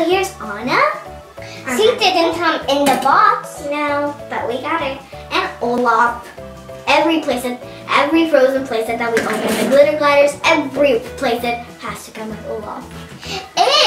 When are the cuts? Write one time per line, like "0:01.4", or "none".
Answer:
0:04.6